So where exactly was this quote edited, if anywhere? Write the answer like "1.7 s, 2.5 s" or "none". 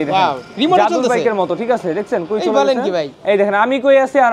3.1 s